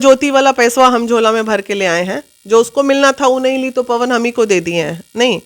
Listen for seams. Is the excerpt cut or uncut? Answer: uncut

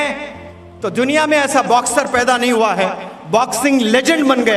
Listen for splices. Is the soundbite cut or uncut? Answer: uncut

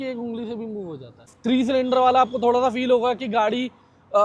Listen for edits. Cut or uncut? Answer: cut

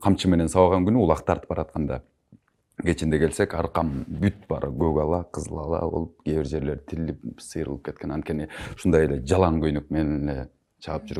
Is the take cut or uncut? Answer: uncut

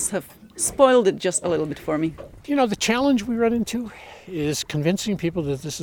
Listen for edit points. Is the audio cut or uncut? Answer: cut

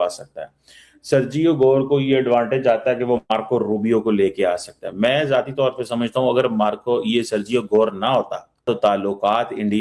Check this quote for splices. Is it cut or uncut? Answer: cut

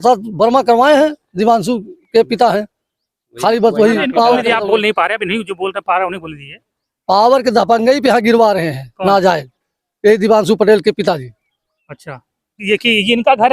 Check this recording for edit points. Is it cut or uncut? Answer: cut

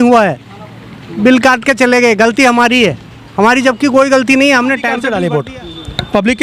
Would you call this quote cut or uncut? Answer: cut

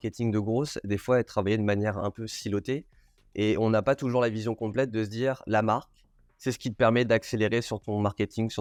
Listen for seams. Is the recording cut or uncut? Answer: uncut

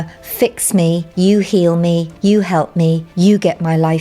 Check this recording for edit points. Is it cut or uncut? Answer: cut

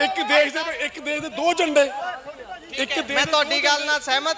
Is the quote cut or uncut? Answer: uncut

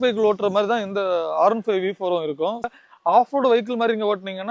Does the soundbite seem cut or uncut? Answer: cut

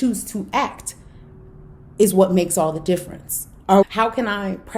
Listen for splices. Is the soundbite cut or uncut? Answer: cut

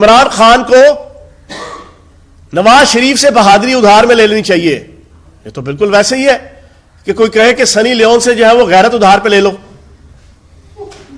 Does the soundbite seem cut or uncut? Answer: uncut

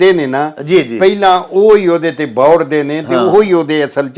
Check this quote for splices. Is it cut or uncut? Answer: uncut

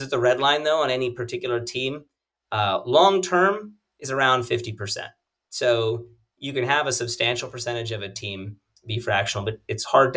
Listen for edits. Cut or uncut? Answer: uncut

